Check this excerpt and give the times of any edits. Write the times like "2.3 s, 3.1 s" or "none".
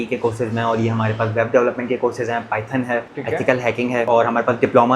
3.1 s, 4.1 s